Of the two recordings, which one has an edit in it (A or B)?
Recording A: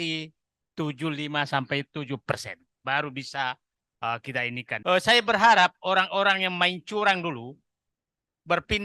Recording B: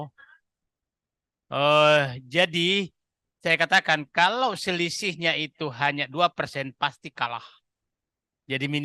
A